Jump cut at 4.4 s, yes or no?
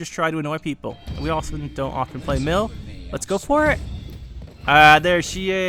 no